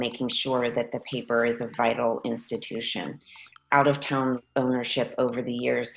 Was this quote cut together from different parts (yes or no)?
yes